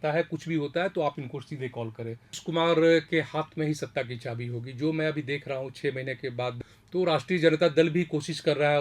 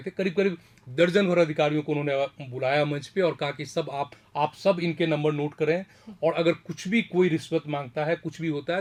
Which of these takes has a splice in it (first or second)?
first